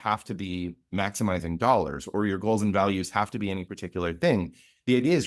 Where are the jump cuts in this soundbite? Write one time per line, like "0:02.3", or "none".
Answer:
none